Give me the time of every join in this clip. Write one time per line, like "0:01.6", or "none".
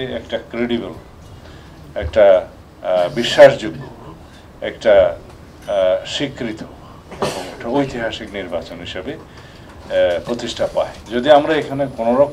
0:11.0